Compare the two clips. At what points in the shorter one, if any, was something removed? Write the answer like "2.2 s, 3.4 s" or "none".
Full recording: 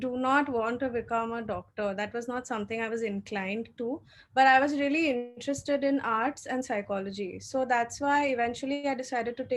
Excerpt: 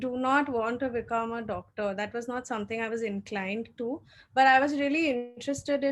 none